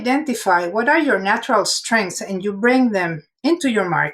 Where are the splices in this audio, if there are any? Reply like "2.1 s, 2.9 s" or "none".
3.2 s

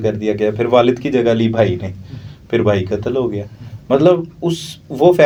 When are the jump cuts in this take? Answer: none

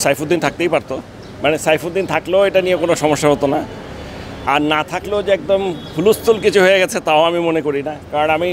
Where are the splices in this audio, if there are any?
none

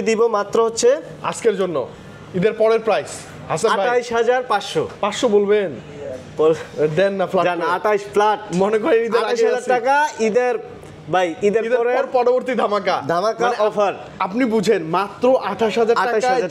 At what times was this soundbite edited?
none

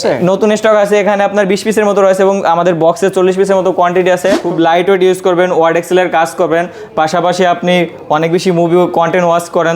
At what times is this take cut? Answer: 4.4 s

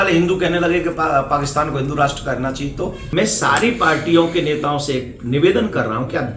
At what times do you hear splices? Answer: 3.0 s

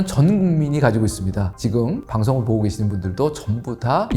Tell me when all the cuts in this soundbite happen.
none

